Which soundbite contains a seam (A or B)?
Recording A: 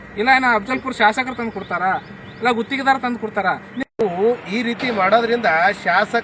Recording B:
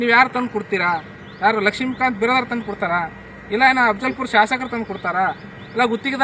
A